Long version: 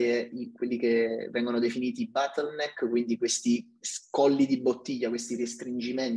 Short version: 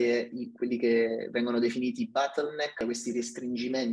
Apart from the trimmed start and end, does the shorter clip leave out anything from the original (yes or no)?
yes